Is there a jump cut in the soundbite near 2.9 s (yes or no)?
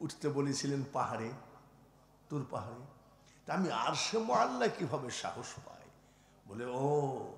no